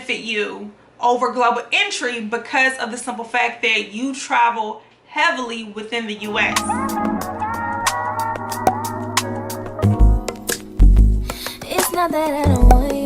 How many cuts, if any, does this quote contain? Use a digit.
1